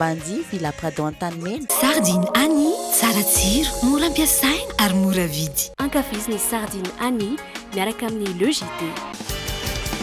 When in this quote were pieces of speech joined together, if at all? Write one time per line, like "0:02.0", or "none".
0:01.6